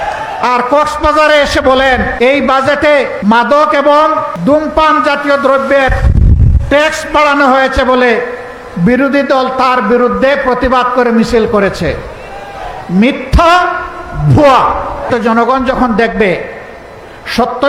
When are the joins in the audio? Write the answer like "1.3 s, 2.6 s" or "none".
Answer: 2.1 s, 3.1 s, 4.3 s, 15.1 s